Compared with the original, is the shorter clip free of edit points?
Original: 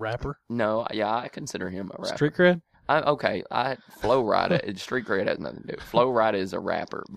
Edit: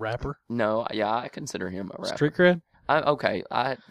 yes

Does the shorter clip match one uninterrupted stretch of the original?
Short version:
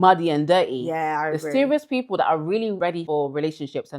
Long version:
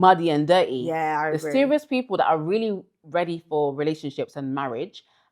no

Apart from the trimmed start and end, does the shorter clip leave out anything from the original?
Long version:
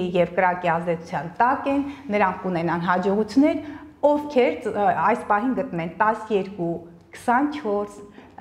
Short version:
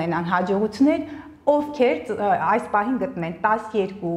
no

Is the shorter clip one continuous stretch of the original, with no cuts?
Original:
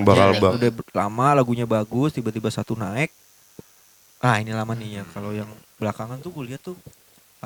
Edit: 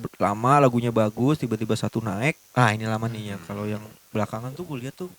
no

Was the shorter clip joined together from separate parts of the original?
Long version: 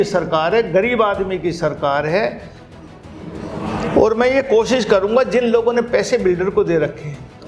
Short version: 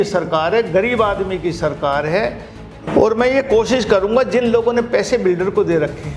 yes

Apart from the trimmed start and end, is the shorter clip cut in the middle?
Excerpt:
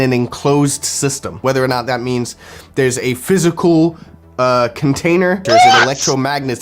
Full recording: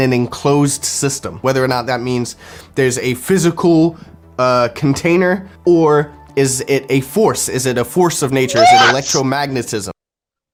yes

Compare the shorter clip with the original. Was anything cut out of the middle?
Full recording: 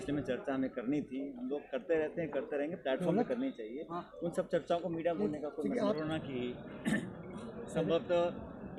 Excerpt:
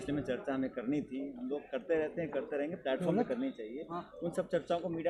no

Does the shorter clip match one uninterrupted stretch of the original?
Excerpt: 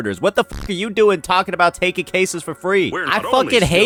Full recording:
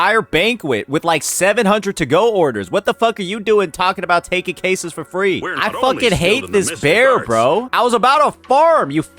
yes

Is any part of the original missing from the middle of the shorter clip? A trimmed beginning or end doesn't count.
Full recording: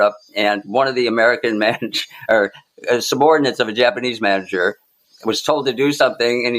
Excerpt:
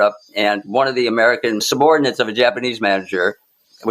yes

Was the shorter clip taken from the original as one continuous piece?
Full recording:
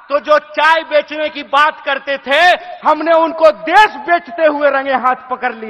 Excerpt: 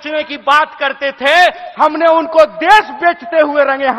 yes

